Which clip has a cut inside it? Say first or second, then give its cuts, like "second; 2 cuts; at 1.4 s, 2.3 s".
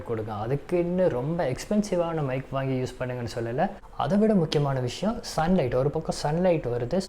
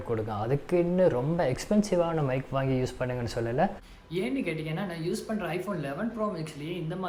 first; 1 cut; at 3.9 s